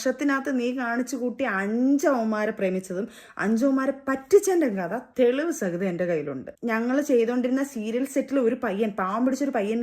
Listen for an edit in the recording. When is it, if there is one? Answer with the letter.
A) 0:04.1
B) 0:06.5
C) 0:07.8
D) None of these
B